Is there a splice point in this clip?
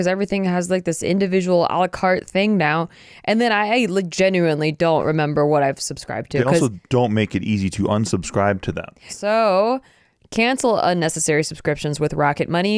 yes; 1 cut; at 9.1 s

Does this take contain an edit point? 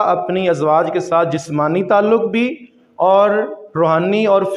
no; 0 cuts

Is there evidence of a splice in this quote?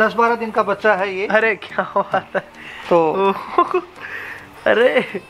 no; 0 cuts

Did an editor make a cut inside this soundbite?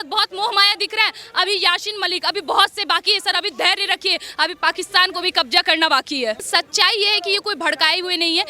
yes; 1 cut; at 6.4 s

